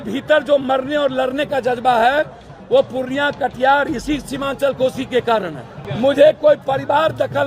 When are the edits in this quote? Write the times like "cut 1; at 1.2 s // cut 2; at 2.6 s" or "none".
cut 1; at 5.8 s